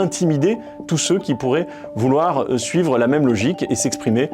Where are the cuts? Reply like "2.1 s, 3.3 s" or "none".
1.4 s